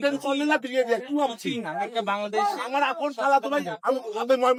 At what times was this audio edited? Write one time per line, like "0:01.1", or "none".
none